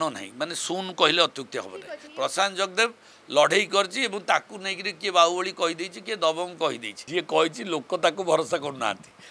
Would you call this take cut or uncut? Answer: cut